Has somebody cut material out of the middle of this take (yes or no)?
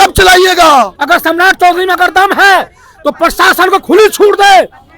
yes